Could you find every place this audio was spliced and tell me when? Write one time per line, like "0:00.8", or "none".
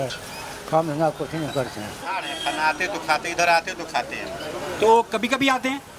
0:02.0